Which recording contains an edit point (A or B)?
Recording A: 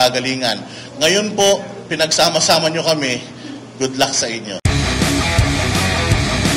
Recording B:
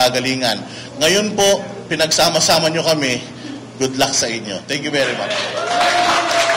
A